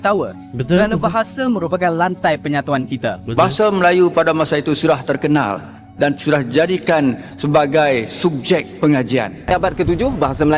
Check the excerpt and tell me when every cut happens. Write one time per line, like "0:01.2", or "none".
0:03.3
0:09.5